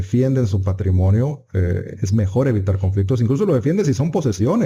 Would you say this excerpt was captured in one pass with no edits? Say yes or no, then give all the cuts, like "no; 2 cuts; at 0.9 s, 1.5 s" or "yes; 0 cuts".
yes; 0 cuts